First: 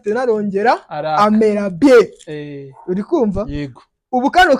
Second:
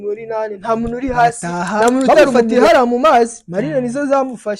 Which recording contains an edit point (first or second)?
second